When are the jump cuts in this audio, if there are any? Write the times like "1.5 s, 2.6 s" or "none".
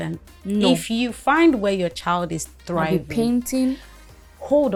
none